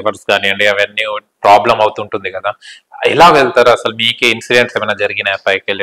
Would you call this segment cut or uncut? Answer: uncut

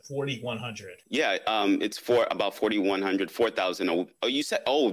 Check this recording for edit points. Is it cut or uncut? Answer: cut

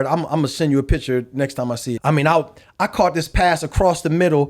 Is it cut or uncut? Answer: cut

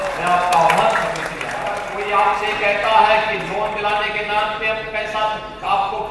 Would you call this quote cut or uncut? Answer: cut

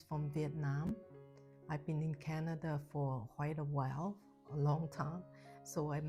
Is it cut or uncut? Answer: uncut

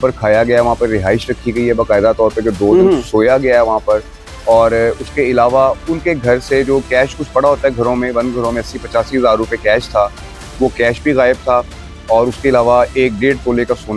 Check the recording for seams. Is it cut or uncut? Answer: uncut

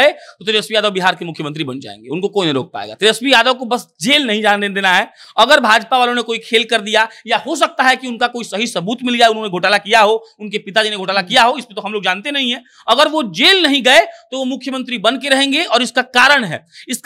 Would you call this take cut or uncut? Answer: uncut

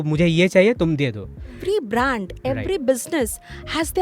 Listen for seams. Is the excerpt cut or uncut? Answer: cut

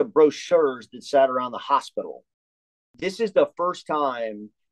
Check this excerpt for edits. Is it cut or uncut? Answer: cut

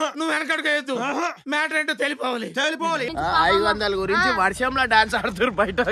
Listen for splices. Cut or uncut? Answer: cut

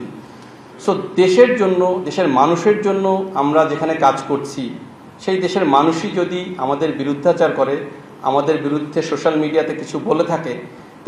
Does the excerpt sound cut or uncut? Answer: uncut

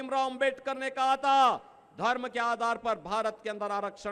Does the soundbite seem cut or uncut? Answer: uncut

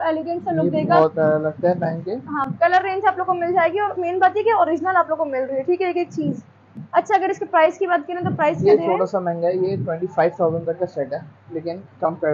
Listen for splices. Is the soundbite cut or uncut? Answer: uncut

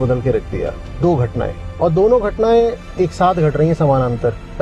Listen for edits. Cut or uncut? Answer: uncut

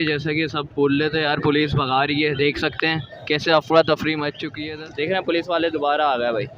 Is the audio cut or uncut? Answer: cut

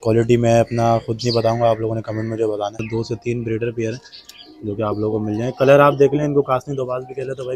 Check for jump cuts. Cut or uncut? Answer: cut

